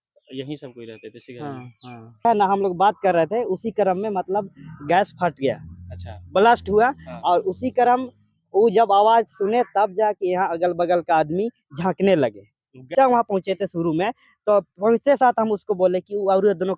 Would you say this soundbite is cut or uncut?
cut